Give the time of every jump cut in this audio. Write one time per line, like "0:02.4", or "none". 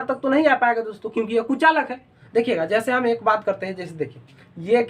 0:02.2